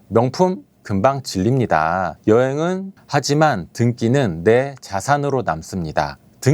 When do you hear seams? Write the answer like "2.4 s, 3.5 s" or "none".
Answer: 2.1 s, 3.0 s